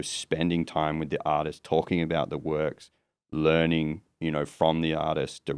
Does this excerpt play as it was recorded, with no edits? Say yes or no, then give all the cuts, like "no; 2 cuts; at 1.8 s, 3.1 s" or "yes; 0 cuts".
yes; 0 cuts